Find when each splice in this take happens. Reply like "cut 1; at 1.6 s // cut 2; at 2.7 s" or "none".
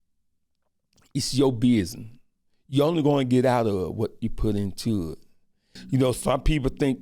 cut 1; at 5.8 s